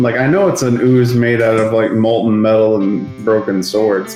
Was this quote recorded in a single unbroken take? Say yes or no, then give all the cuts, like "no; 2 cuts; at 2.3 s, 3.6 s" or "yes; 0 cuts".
yes; 0 cuts